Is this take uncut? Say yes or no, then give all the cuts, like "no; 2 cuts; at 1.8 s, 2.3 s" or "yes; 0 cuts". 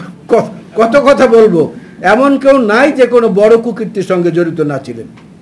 yes; 0 cuts